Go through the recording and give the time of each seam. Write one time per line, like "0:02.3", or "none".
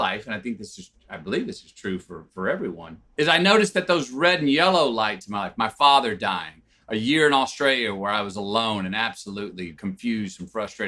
none